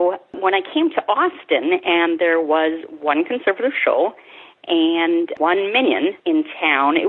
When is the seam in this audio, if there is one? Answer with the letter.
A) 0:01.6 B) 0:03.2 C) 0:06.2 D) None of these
D